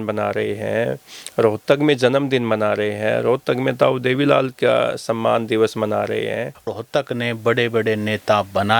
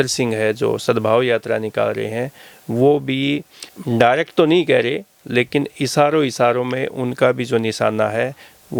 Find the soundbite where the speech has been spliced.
first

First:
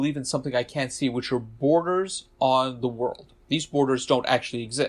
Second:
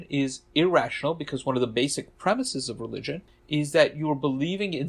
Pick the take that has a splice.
second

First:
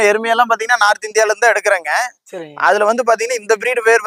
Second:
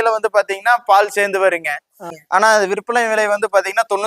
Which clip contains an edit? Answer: second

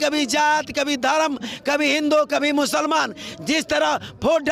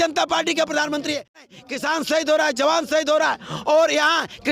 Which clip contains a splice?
second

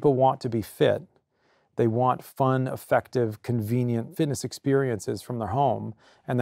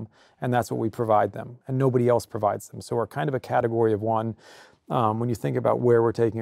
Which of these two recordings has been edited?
first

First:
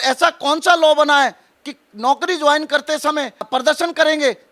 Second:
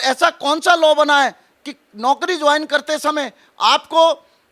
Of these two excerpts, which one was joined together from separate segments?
first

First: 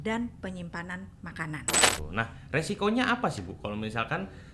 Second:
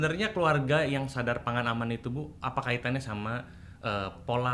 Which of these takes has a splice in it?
first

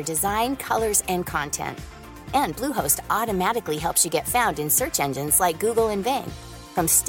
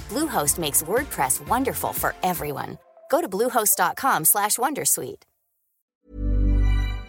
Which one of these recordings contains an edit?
second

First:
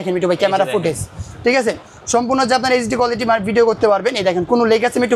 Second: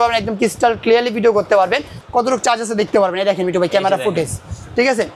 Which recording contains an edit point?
second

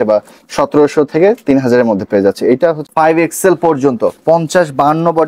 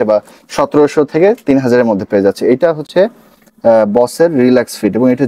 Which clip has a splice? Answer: first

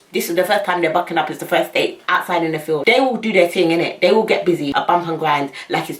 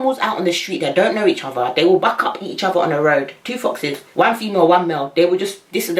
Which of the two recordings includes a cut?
first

